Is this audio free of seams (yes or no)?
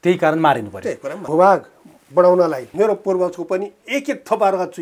no